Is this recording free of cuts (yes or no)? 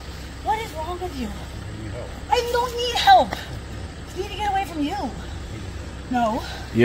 yes